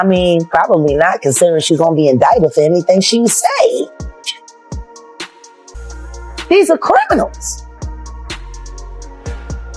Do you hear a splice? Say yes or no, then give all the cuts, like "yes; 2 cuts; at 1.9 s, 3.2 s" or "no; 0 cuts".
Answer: yes; 1 cut; at 7.4 s